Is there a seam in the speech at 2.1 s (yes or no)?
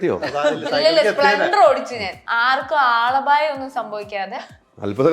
yes